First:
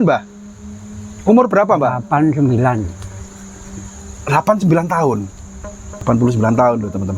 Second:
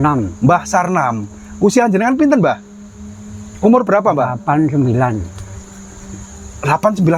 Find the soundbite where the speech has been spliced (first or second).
first